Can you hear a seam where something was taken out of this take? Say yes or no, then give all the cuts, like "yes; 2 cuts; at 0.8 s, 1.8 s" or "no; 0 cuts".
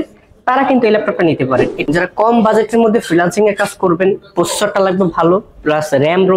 yes; 1 cut; at 1.8 s